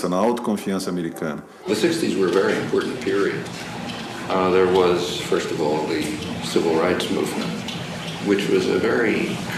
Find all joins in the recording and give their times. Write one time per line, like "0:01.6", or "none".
0:01.5